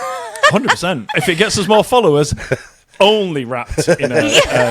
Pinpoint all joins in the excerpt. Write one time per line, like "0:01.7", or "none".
0:01.1